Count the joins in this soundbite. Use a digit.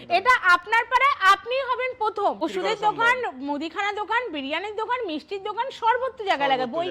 1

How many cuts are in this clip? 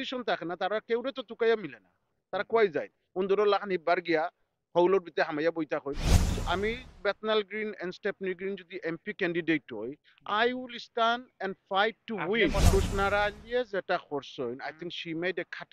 2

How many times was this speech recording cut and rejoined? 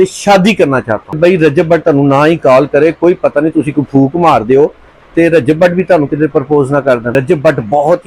2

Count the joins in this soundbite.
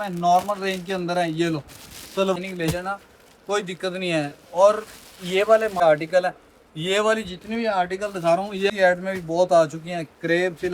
3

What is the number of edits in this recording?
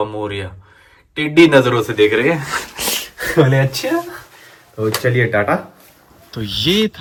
0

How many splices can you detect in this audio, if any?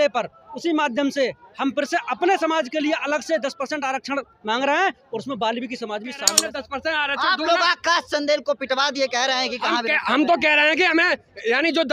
1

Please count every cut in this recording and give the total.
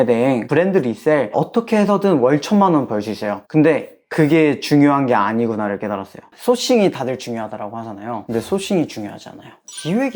1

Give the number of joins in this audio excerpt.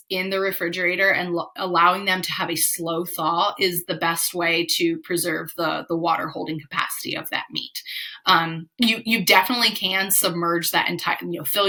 0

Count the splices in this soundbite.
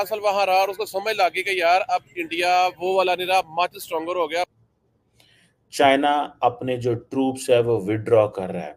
1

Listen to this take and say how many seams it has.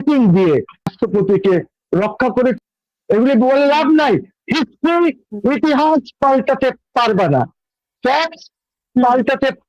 2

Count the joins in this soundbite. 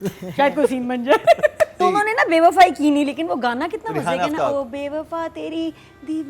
1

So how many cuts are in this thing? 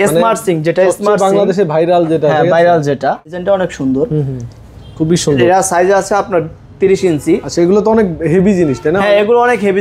1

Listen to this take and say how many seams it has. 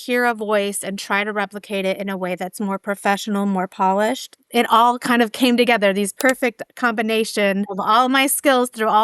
2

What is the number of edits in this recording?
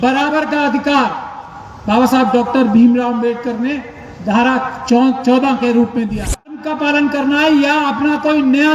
1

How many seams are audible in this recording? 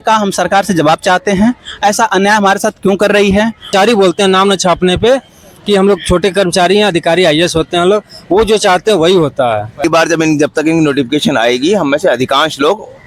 2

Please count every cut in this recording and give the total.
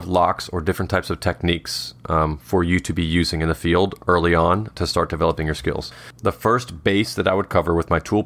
1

